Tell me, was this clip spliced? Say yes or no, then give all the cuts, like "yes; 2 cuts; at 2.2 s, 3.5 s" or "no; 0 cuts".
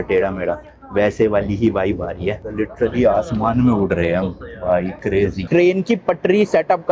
yes; 2 cuts; at 2.4 s, 5.4 s